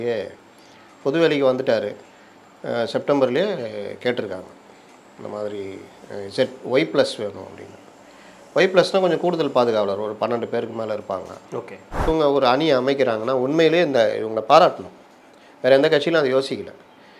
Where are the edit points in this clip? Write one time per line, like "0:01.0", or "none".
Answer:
0:12.1